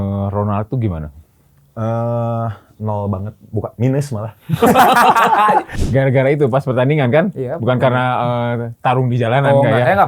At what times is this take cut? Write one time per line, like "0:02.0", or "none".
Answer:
0:05.7